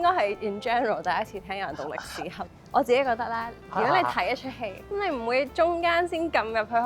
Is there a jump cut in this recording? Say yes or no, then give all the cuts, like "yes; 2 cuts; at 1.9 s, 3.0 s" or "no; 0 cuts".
yes; 2 cuts; at 2.4 s, 4.8 s